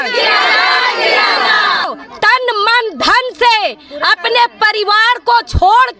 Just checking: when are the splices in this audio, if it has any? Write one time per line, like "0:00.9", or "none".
0:02.0